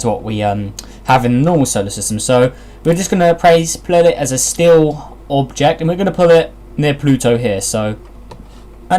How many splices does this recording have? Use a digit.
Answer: 0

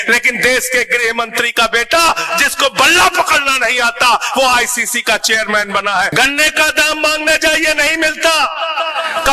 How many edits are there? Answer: 1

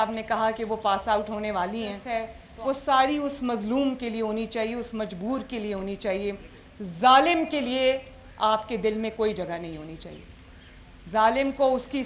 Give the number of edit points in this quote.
1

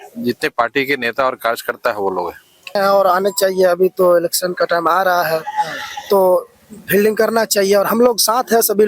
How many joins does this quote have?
1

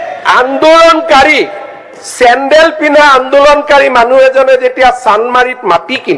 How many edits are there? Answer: 0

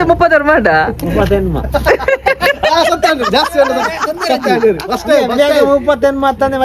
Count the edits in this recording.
0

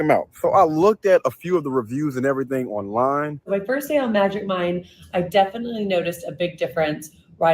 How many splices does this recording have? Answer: 1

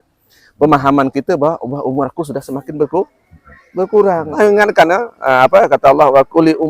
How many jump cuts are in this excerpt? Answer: 1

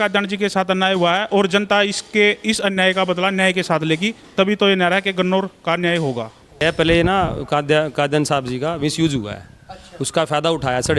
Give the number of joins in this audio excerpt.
1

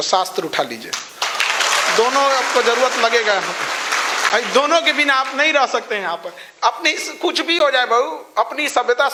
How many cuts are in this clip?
0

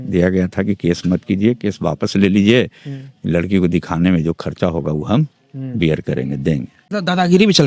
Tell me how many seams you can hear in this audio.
1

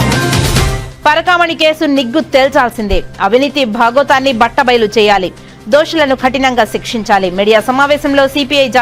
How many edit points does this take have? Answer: 0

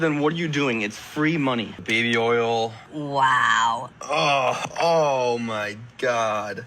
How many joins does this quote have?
2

